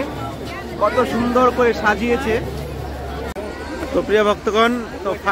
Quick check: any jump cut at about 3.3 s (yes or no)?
yes